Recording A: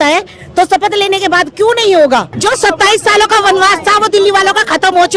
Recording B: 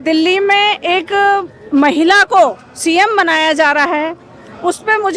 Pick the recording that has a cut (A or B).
A